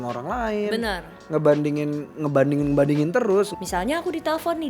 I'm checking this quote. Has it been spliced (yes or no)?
yes